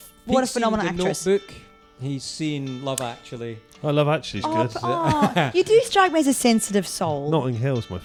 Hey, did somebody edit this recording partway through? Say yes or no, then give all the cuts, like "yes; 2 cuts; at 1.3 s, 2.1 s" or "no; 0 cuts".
no; 0 cuts